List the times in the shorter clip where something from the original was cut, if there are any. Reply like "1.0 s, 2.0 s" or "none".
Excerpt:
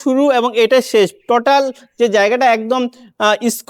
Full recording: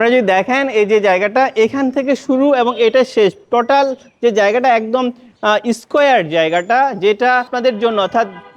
none